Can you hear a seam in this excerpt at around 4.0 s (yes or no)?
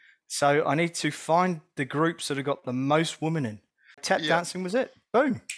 yes